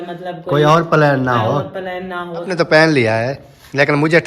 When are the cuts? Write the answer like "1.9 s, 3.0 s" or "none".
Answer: 2.5 s